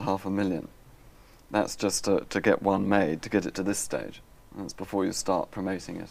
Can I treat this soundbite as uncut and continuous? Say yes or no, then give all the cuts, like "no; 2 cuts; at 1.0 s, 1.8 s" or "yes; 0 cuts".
yes; 0 cuts